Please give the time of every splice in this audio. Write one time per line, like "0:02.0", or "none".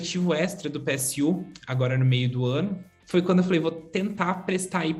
0:02.9